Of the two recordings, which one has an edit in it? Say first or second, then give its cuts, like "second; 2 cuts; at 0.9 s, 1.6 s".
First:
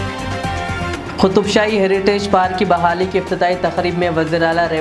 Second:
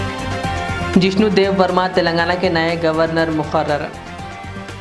first; 1 cut; at 0.9 s